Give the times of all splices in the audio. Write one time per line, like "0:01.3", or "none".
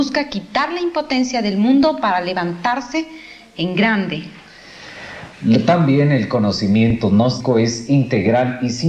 0:04.5